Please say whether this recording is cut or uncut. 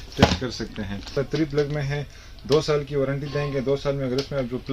cut